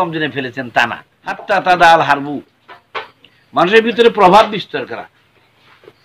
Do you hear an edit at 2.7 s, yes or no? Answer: no